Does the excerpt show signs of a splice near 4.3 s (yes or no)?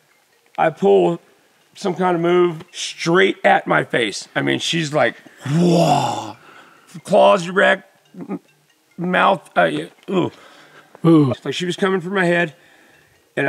no